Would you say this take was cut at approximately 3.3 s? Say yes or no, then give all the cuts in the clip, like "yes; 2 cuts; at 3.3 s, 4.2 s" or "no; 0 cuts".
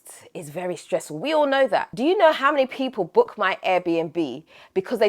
no; 1 cut; at 1.9 s